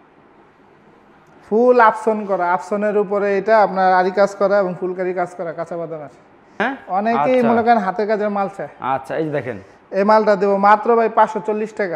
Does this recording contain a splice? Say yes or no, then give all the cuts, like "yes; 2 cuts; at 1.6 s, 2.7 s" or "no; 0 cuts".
yes; 1 cut; at 6.6 s